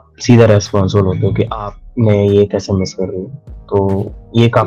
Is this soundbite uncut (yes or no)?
yes